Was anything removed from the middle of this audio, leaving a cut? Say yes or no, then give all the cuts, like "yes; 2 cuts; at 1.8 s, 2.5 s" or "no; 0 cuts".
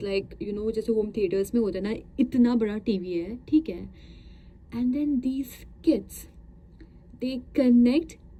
no; 0 cuts